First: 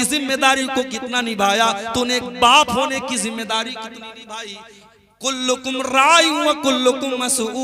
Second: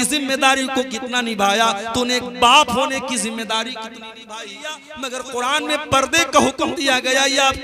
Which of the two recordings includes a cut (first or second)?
second